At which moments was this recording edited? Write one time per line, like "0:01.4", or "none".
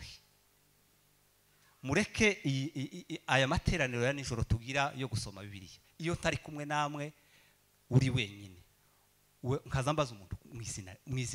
none